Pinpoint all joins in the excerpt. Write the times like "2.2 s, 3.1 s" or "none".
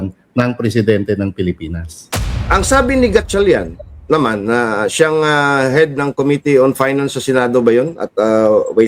2.0 s